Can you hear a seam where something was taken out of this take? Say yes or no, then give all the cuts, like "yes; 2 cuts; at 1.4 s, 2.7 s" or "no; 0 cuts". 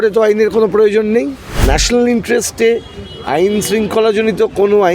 yes; 1 cut; at 1.5 s